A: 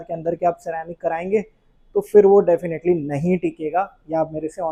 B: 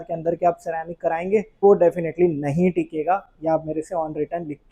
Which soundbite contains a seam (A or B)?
B